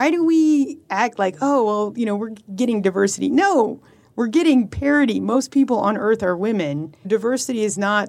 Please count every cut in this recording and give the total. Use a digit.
2